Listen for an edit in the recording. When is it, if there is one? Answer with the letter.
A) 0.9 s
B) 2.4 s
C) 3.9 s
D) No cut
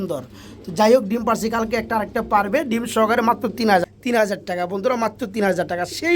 C